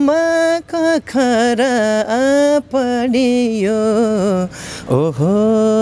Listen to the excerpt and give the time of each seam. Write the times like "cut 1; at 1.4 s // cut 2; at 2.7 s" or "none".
none